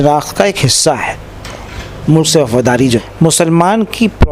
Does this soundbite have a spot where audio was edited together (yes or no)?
yes